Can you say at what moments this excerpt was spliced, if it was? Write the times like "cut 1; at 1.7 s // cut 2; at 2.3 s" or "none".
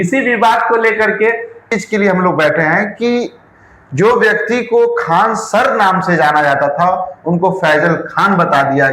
cut 1; at 1.7 s